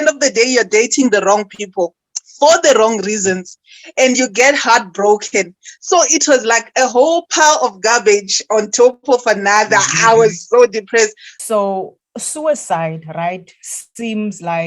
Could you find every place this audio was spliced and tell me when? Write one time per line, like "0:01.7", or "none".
0:11.3